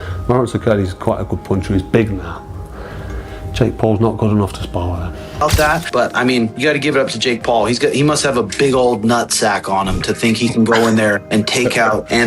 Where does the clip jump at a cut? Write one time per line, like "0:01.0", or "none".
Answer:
0:05.4